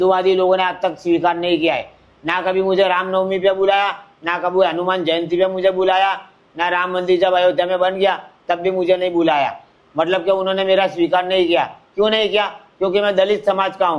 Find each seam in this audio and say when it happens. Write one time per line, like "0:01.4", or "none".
none